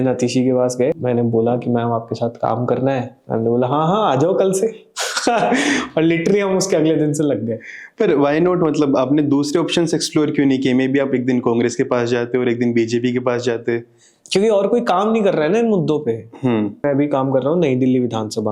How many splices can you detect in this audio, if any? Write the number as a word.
two